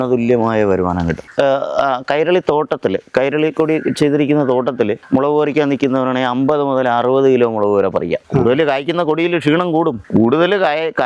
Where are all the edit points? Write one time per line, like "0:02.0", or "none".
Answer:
0:01.3
0:08.2
0:10.0